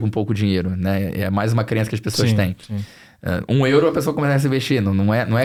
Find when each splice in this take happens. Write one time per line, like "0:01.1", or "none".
none